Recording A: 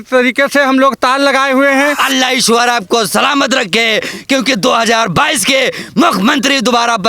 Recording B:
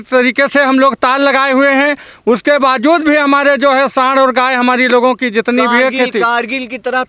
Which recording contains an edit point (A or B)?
A